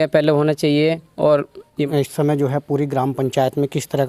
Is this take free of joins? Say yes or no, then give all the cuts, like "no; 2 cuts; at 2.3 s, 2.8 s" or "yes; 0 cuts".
no; 1 cut; at 1.8 s